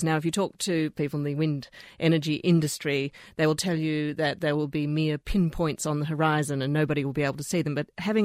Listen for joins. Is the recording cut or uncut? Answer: cut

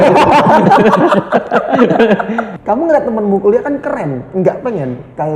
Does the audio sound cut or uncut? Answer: cut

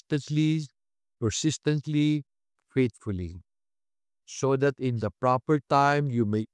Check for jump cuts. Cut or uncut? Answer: uncut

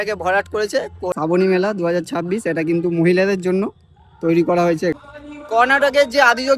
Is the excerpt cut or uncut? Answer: cut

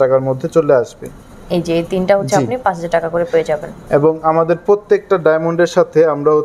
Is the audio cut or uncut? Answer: uncut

